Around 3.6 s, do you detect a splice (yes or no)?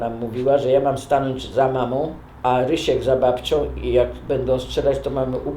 no